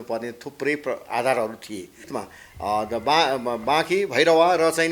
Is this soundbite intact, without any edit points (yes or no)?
no